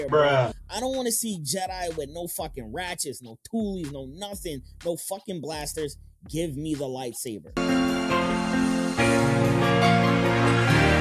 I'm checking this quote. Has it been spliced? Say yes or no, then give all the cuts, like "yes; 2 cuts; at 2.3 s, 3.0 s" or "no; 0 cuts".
no; 0 cuts